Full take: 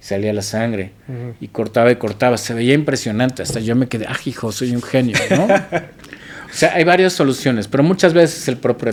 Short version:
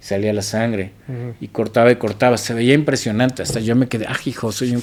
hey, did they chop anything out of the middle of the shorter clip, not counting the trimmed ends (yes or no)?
no